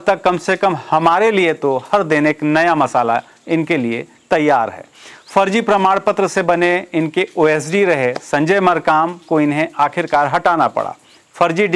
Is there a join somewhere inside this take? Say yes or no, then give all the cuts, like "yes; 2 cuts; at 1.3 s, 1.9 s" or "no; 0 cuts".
no; 0 cuts